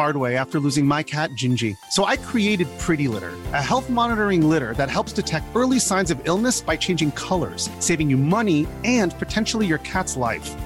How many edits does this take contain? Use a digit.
0